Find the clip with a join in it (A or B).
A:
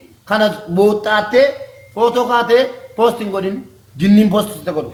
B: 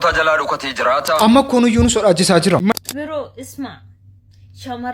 B